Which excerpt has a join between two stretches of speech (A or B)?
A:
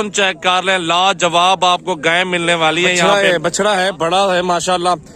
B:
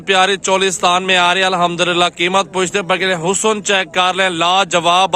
A